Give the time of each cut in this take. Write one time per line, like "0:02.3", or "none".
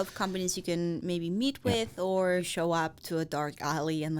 0:02.5